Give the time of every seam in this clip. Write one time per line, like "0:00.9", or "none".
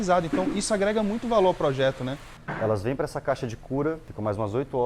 0:02.3